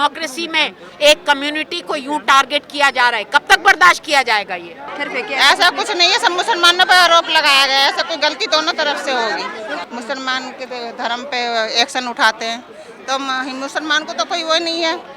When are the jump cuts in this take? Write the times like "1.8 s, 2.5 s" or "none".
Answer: 4.4 s, 9.8 s